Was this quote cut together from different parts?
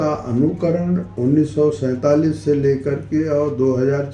yes; 1 cut; at 1.1 s

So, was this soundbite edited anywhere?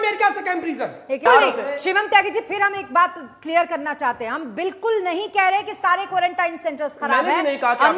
yes; 1 cut; at 1.2 s

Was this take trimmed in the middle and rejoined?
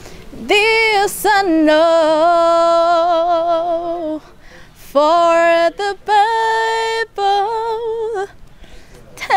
no; 0 cuts

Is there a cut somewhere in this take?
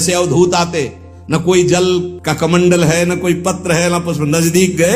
no; 0 cuts

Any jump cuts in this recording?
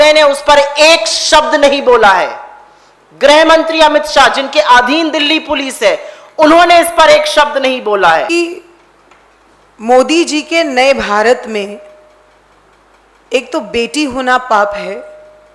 yes; 1 cut; at 8.3 s

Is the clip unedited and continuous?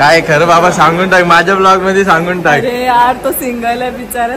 yes; 0 cuts

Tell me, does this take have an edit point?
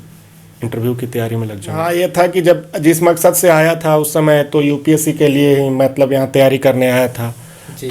yes; 1 cut; at 1.8 s

